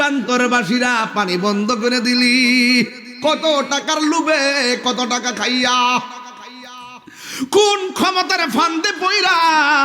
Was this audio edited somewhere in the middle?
no; 0 cuts

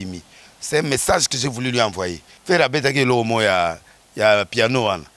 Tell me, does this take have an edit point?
yes; 1 cut; at 2.3 s

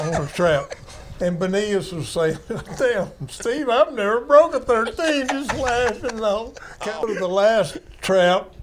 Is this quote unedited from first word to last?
no; 1 cut; at 7.1 s

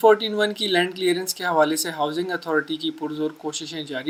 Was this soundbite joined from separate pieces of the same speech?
no; 0 cuts

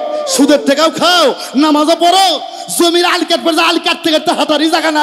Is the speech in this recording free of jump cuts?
yes; 0 cuts

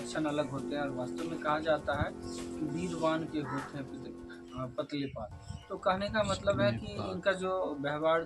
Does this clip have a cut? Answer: no; 0 cuts

